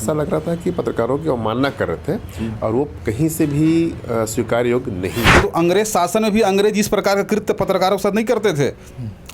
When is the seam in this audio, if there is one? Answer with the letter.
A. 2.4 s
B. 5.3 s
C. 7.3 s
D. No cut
B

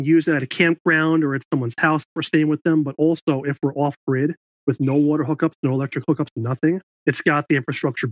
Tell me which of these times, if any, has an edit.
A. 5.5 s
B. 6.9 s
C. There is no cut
B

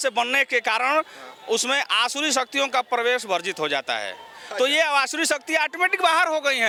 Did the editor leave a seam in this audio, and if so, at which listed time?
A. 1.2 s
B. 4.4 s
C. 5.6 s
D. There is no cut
D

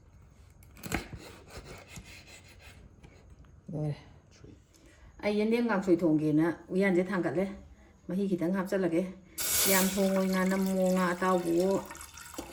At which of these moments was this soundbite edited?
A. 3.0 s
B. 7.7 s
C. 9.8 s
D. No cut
D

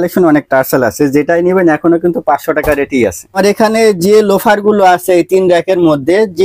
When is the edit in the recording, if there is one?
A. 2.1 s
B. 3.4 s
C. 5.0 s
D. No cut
B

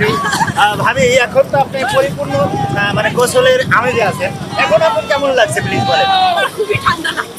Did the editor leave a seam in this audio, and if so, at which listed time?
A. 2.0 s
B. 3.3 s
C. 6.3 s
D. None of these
D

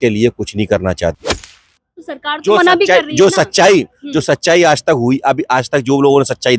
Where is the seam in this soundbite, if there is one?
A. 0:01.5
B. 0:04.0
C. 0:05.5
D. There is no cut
A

